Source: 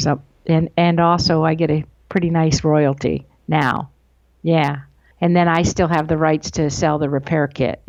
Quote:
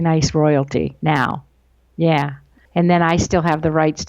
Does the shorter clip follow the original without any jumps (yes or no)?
no